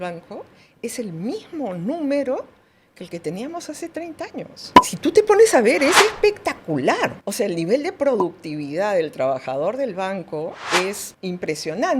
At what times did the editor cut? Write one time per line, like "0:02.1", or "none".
0:07.2
0:11.1

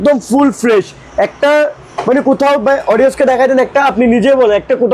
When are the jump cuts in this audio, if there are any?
none

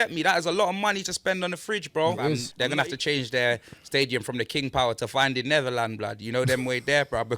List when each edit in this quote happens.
0:02.5

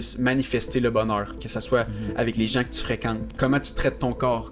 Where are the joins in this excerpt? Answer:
0:03.3

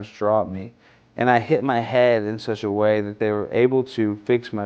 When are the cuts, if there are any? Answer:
none

